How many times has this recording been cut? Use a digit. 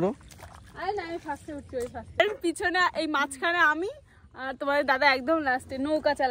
1